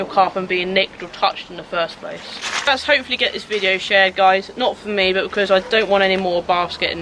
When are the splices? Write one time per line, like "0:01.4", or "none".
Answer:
none